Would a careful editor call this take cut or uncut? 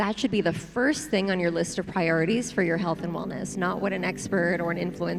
uncut